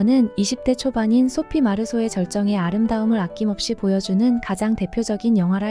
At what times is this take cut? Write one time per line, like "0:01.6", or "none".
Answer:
none